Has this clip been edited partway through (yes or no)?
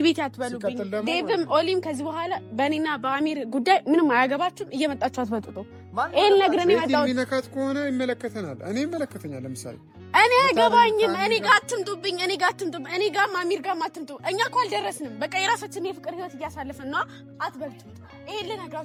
no